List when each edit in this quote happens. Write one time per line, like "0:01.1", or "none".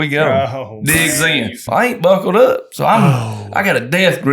0:01.6